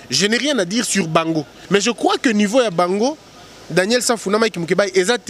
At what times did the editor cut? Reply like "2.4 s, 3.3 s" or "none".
1.5 s